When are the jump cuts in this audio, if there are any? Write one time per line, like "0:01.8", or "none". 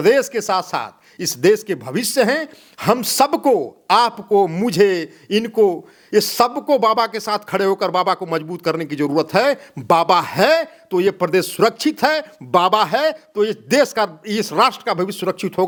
none